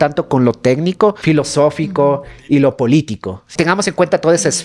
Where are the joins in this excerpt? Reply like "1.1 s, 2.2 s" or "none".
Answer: 1.2 s, 3.5 s